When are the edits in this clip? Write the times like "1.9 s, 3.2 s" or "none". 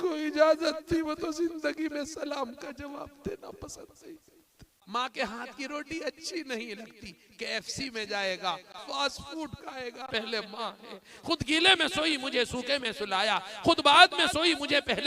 4.7 s, 8.8 s, 10.1 s